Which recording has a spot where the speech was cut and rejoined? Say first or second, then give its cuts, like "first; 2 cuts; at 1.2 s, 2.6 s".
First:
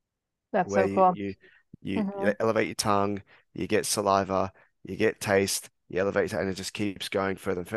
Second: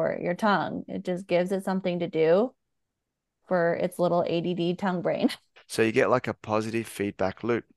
second; 1 cut; at 5.5 s